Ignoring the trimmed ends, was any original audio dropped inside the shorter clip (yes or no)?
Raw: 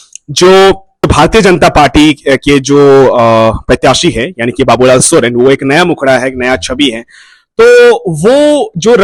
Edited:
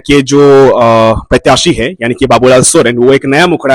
no